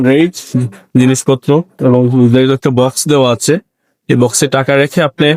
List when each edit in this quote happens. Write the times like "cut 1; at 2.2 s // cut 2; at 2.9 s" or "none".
none